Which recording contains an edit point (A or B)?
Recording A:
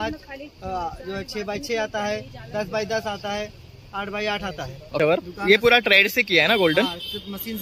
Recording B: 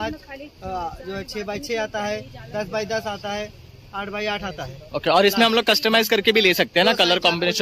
A